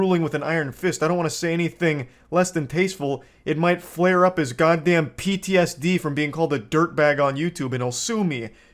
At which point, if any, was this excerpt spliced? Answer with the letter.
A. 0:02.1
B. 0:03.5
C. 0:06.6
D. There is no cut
D